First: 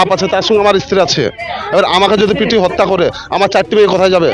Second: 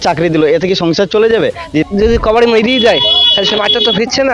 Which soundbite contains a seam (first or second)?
second